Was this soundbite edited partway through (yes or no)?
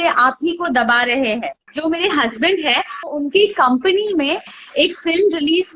yes